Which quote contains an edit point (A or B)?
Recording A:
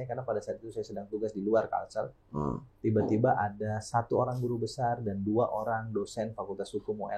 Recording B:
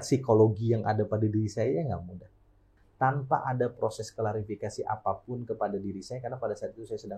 B